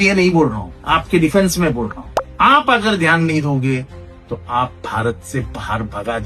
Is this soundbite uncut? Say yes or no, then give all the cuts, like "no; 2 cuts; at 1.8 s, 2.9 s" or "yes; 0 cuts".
yes; 0 cuts